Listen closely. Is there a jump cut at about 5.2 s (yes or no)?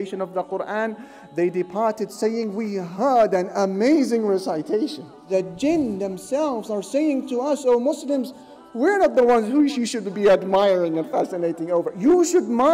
yes